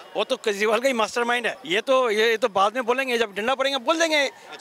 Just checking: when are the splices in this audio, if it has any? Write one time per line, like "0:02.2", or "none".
0:01.6

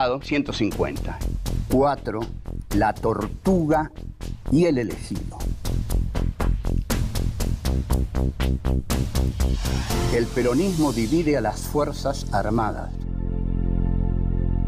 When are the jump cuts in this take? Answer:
0:01.1

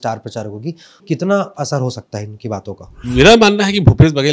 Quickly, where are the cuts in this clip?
0:01.0
0:02.9

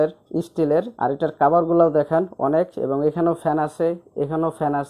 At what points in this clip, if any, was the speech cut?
0:00.9

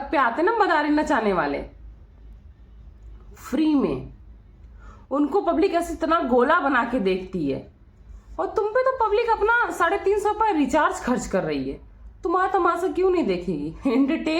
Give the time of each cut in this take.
none

